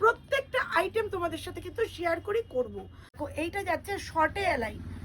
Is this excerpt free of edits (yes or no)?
no